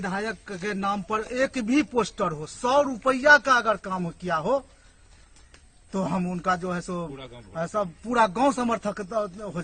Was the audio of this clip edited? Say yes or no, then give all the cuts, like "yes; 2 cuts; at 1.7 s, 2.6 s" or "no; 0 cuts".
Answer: no; 0 cuts